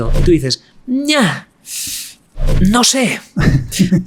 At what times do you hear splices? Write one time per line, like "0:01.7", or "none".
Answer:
none